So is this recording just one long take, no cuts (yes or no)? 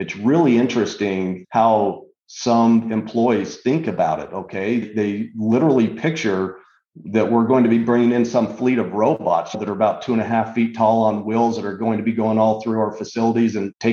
yes